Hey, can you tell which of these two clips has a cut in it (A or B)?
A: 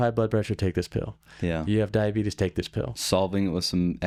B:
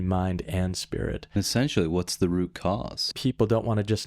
B